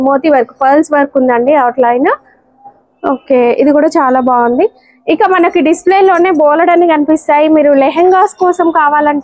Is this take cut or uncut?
uncut